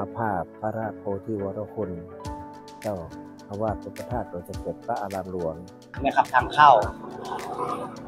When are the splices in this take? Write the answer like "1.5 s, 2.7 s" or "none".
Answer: 5.9 s